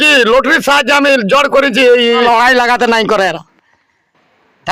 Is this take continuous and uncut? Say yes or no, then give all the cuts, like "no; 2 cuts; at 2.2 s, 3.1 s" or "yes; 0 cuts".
no; 1 cut; at 2.2 s